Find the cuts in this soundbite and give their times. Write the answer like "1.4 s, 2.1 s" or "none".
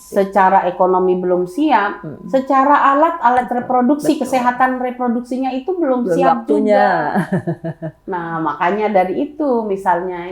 none